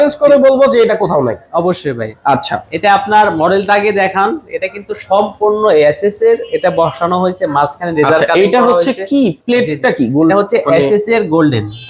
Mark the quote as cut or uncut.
uncut